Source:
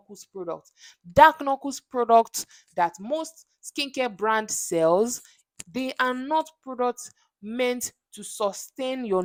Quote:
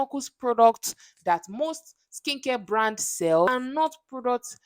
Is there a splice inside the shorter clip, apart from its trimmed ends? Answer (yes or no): yes